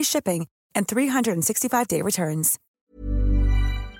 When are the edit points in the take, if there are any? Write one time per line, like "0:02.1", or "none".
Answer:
0:02.8